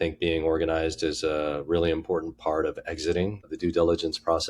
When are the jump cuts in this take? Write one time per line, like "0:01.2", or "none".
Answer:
0:03.5